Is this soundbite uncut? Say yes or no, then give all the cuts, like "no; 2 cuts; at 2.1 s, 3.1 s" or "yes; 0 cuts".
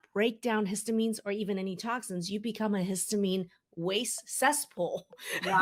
yes; 0 cuts